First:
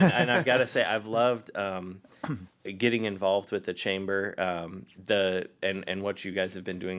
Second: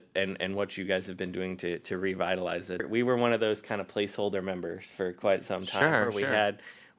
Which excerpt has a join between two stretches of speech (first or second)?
second